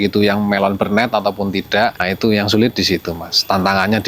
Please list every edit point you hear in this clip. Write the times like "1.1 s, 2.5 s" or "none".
2.0 s